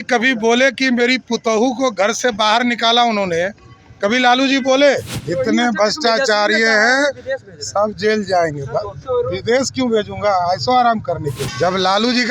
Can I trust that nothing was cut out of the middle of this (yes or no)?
no